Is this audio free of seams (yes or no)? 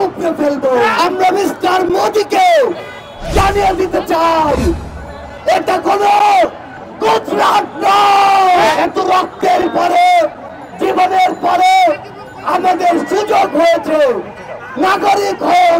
no